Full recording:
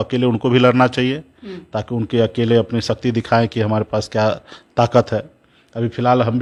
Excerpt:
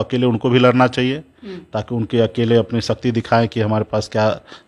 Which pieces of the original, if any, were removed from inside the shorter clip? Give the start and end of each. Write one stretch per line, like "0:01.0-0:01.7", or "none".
none